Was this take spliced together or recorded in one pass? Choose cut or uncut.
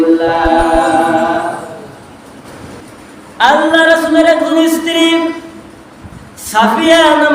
cut